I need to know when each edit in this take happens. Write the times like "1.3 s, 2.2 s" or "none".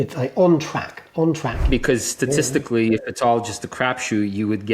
1.7 s